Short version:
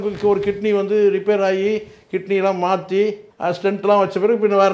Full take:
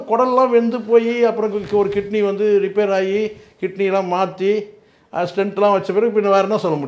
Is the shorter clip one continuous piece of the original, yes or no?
no